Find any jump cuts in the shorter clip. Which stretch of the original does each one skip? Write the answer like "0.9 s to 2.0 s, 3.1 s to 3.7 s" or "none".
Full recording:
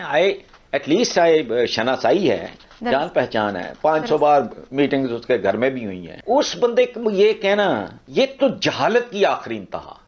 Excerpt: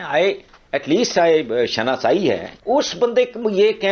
2.5 s to 6.1 s